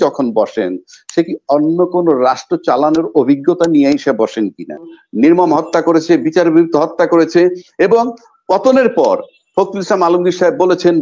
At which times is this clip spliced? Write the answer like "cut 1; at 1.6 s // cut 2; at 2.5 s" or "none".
cut 1; at 5.0 s